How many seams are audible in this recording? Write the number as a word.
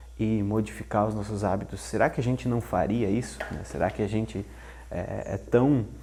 zero